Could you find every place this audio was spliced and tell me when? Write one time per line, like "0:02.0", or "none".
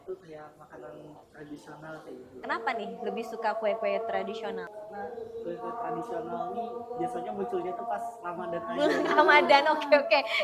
0:01.3
0:02.4
0:04.7

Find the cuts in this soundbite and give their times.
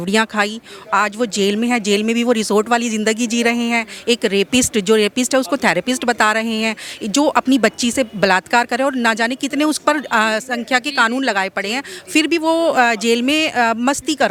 none

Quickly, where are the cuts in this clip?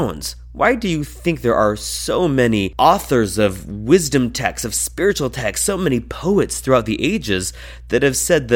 0:02.7

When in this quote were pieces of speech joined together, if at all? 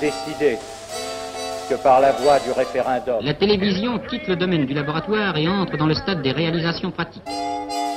0:03.3

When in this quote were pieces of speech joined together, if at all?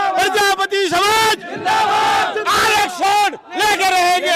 none

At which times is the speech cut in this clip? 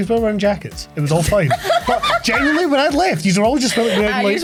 none

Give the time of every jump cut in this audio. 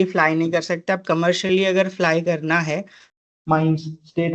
0:03.0

